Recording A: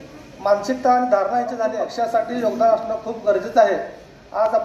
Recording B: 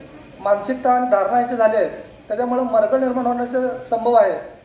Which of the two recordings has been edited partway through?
A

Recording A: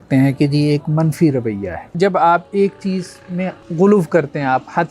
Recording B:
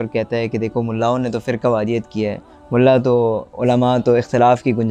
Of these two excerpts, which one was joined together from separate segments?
A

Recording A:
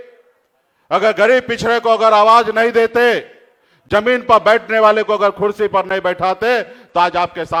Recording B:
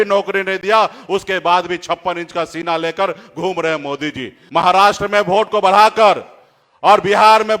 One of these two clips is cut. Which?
B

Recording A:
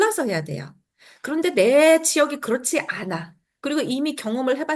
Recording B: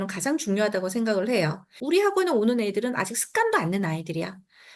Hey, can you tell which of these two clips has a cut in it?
B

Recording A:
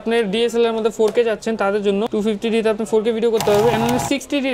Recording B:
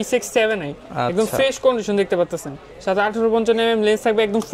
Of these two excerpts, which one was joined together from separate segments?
A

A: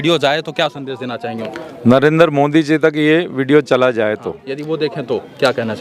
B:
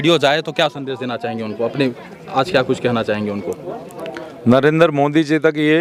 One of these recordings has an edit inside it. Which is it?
A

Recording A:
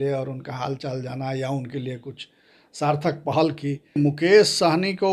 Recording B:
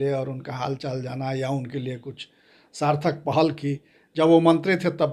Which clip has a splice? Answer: A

